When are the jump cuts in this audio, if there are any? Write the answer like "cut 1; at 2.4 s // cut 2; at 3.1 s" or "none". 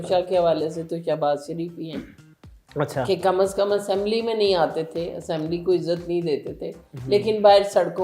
none

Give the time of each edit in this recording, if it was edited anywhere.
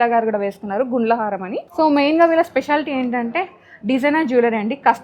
cut 1; at 1.6 s

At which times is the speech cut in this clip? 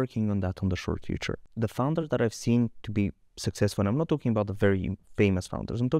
cut 1; at 1.5 s // cut 2; at 5.0 s

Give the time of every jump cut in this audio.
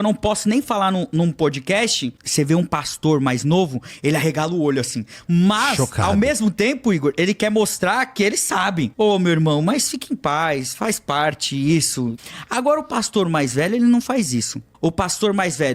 cut 1; at 2.2 s // cut 2; at 8.9 s // cut 3; at 12.2 s // cut 4; at 14.6 s

